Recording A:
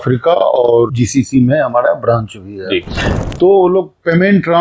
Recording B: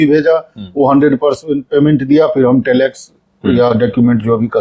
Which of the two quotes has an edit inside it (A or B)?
A